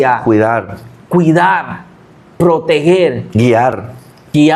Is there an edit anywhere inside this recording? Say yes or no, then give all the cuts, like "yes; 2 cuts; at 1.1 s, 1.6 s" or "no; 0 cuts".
no; 0 cuts